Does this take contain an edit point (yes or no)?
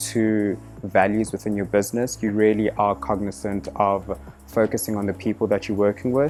no